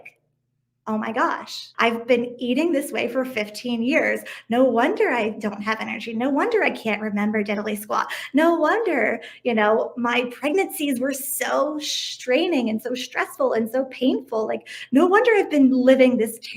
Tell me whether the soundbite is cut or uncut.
cut